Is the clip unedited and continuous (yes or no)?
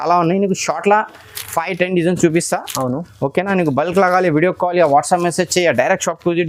yes